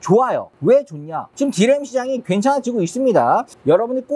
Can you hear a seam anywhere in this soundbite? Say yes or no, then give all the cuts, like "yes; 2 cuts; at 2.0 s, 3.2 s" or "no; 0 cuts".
no; 0 cuts